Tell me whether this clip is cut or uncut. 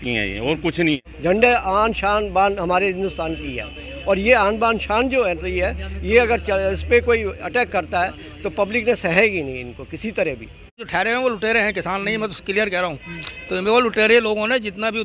cut